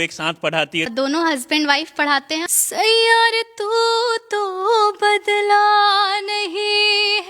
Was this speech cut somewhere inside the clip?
yes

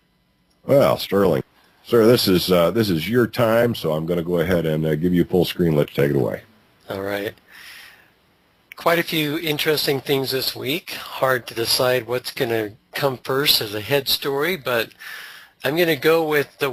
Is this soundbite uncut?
yes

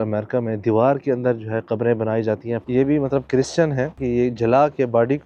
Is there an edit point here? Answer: yes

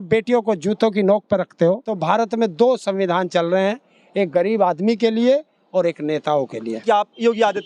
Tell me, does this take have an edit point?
yes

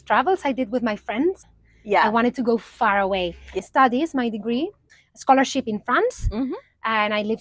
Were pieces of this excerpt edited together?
yes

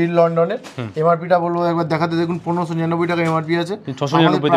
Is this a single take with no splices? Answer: yes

